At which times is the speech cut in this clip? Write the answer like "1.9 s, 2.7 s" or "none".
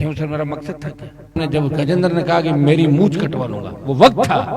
1.4 s